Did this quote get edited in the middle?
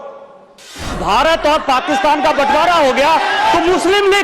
yes; 1 cut; at 1.0 s

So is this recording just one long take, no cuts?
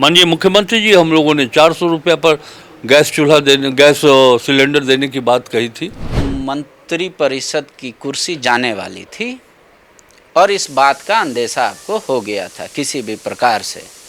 no; 1 cut; at 6.2 s

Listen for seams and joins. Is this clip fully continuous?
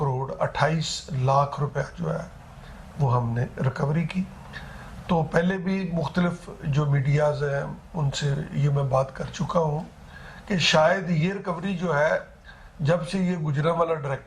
yes; 0 cuts

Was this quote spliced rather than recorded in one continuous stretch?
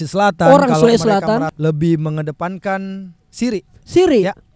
yes; 1 cut; at 1.5 s

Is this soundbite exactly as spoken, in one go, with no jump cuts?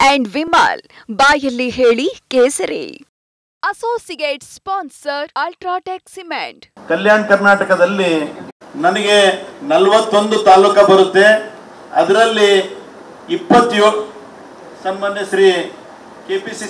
no; 1 cut; at 6.7 s

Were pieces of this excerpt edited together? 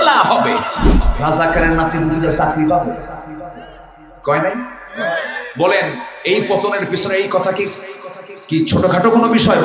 yes; 1 cut; at 1.0 s

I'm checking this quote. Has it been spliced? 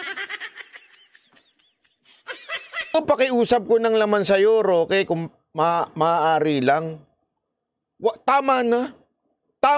yes; 1 cut; at 2.9 s

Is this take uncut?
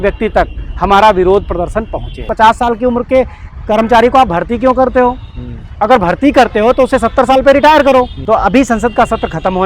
no; 2 cuts; at 2.3 s, 8.2 s

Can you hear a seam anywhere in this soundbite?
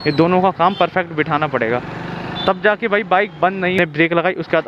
yes; 1 cut; at 3.8 s

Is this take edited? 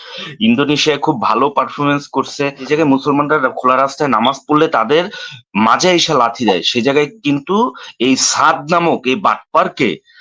yes; 1 cut; at 2.7 s

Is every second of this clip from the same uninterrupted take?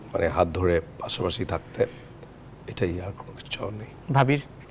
yes; 0 cuts

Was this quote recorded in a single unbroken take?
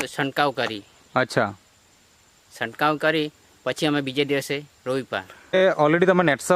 no; 1 cut; at 5.6 s

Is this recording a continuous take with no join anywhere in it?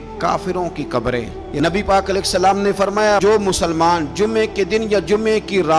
no; 1 cut; at 1.4 s

